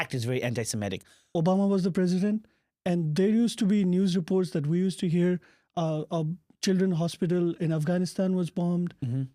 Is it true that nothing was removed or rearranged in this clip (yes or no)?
no